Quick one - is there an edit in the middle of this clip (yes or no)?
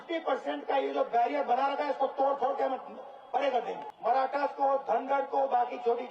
yes